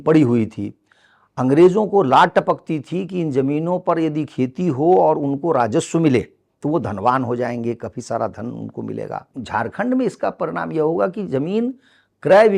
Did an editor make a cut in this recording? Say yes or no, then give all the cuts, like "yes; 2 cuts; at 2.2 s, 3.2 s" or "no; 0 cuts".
yes; 1 cut; at 9.3 s